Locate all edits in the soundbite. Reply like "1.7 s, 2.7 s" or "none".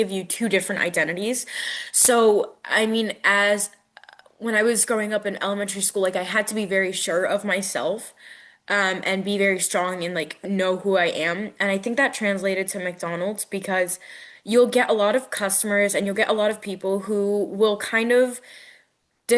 none